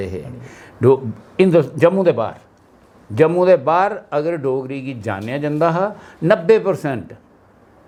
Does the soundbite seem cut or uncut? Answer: uncut